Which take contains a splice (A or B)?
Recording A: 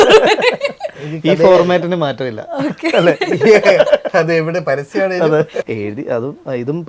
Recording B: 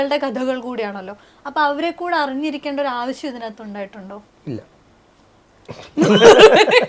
A